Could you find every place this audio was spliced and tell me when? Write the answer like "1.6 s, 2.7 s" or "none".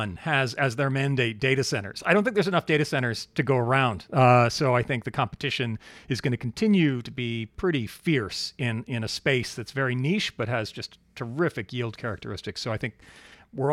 none